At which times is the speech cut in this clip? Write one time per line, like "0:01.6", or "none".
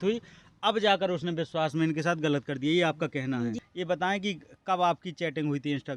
0:03.6